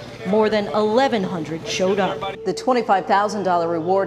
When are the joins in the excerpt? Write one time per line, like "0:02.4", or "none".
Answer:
0:02.3